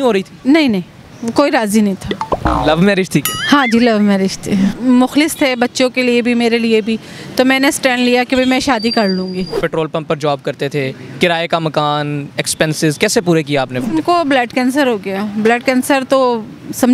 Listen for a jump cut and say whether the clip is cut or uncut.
cut